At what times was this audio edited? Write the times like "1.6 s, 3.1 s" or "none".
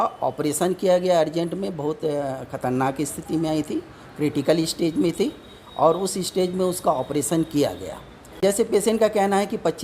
8.4 s